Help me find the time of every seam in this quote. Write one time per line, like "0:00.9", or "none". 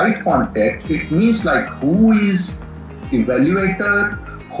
none